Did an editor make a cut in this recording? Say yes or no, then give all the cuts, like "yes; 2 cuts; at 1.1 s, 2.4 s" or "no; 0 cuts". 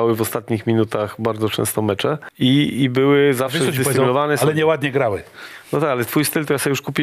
yes; 1 cut; at 2.3 s